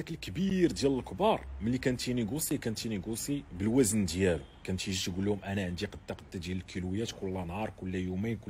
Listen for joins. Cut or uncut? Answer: uncut